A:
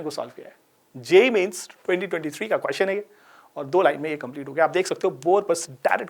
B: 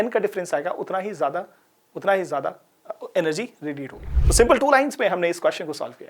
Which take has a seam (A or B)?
B